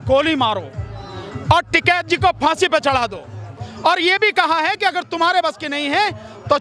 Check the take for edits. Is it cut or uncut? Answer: uncut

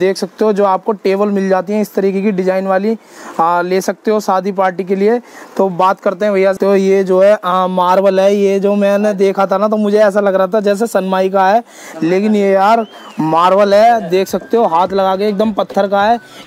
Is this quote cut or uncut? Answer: cut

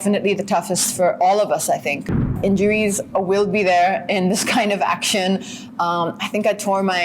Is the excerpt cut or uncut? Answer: cut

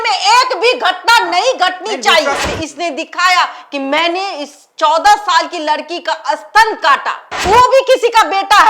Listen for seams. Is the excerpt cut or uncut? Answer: cut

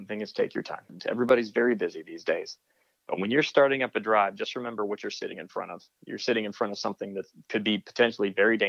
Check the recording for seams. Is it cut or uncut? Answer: cut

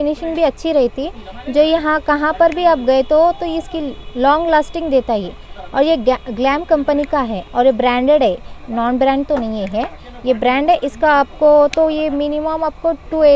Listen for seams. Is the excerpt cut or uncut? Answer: uncut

